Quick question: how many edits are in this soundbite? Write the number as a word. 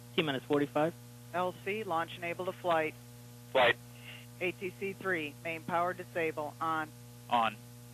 zero